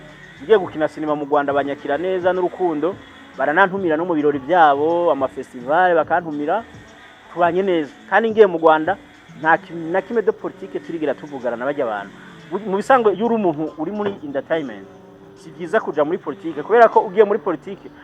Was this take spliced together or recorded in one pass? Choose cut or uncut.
uncut